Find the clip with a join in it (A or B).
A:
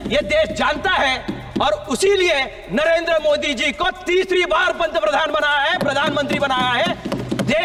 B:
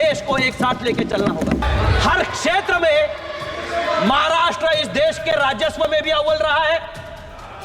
B